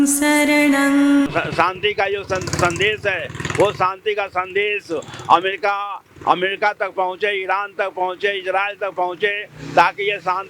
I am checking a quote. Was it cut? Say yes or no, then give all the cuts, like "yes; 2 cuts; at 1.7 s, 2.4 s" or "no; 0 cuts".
yes; 1 cut; at 1.3 s